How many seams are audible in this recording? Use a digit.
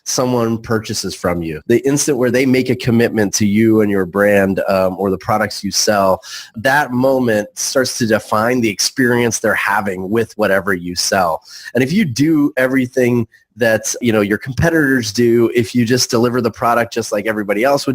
3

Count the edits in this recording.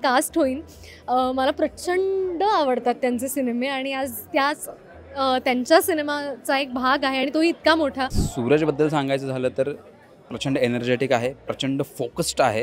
1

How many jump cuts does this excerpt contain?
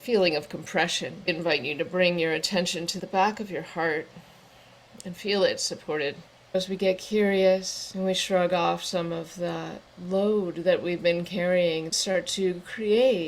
5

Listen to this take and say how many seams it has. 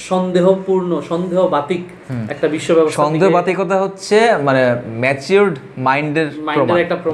0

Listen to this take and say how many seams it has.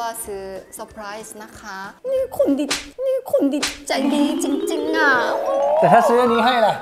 1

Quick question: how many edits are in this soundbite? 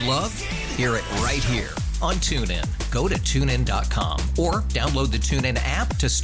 0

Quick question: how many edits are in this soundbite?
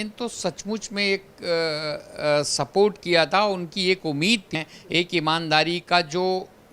1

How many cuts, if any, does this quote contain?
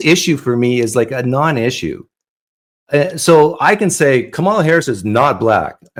0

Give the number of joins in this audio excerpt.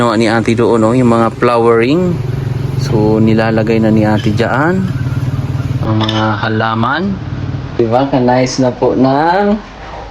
1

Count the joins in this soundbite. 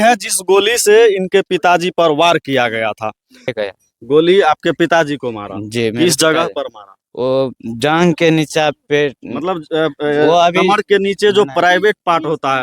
1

